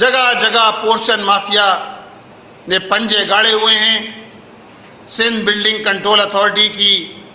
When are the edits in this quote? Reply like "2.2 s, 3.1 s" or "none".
none